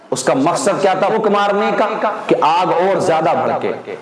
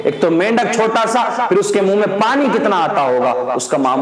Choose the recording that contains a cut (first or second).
first